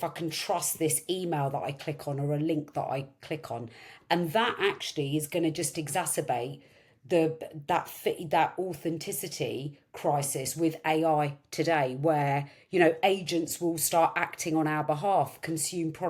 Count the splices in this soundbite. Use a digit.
0